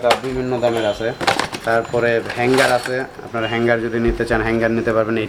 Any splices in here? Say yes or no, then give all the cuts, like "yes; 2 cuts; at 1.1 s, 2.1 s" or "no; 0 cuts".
no; 0 cuts